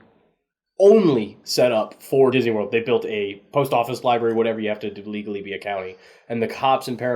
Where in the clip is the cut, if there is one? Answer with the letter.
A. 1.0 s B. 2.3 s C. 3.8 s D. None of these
B